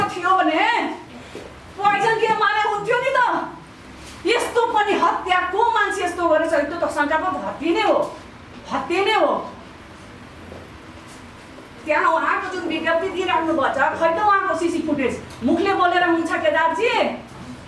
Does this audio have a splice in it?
no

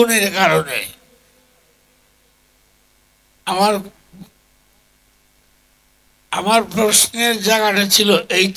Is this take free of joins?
yes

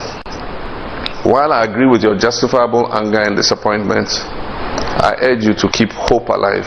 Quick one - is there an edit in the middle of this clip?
no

